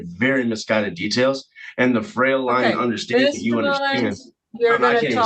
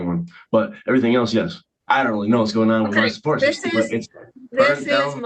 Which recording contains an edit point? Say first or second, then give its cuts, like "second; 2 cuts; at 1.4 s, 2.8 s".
second; 1 cut; at 1.6 s